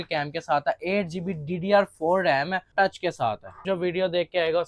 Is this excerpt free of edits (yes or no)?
no